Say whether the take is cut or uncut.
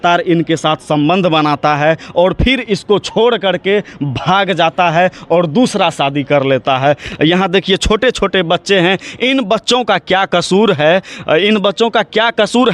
uncut